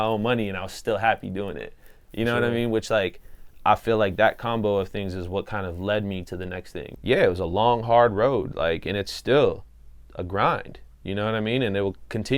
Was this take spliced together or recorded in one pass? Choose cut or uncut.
cut